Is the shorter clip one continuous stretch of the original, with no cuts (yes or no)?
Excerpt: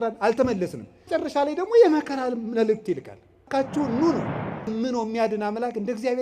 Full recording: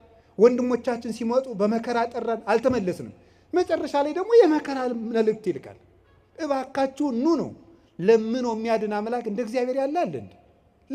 no